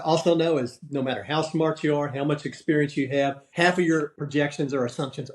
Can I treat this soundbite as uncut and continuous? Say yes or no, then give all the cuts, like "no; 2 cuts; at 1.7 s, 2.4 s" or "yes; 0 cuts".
no; 2 cuts; at 3.4 s, 4.2 s